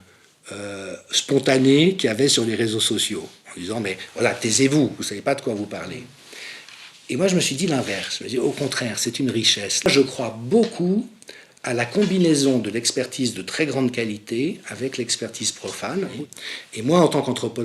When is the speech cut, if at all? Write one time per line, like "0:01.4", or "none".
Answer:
0:09.9
0:16.1

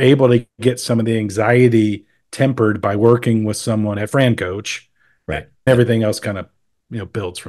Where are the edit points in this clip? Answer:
0:05.7

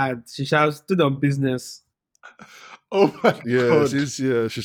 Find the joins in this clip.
0:03.5

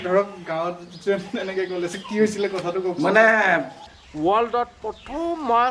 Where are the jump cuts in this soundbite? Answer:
0:04.0

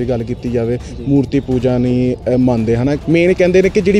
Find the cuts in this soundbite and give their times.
0:03.0

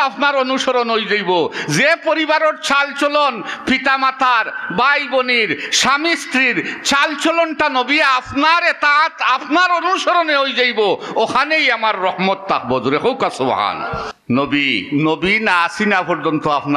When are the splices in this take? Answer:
0:14.1

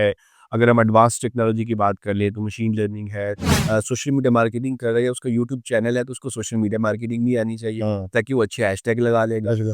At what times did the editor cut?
0:03.5

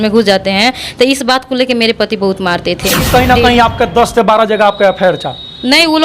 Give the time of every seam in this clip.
0:03.1

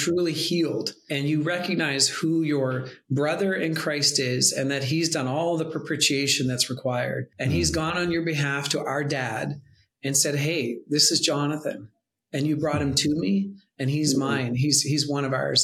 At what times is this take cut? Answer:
0:01.0
0:07.3

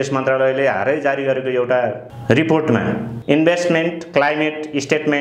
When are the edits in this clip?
0:02.1
0:03.1

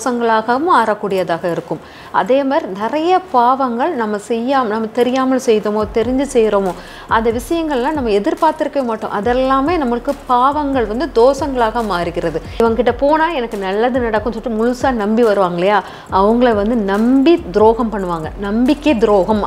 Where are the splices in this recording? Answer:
0:12.6

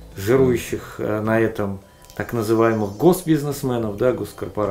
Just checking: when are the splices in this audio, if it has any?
none

